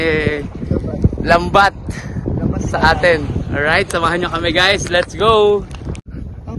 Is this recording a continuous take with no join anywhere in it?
yes; 0 cuts

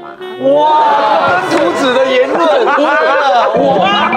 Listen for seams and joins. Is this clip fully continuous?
yes; 0 cuts

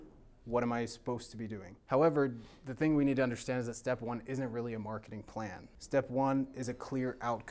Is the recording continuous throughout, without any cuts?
no; 2 cuts; at 1.7 s, 5.7 s

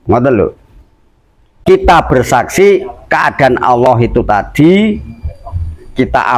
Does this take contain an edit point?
yes; 1 cut; at 1.5 s

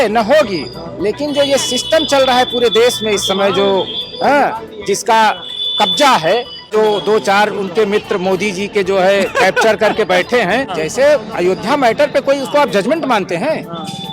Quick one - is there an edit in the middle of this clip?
yes; 2 cuts; at 6.7 s, 10.7 s

